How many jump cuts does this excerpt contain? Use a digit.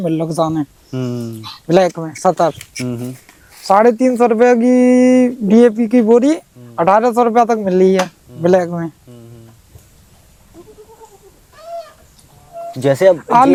0